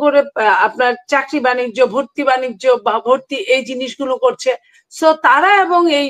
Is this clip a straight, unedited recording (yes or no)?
yes